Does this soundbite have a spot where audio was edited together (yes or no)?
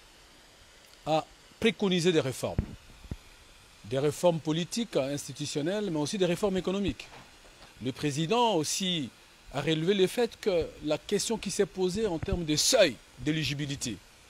no